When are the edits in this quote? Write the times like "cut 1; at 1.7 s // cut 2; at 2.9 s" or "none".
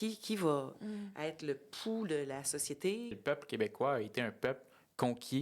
cut 1; at 3.2 s